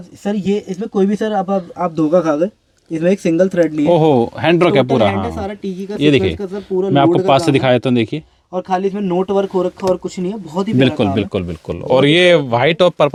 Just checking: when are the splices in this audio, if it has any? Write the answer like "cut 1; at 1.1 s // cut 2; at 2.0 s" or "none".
none